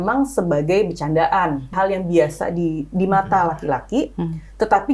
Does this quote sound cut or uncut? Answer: cut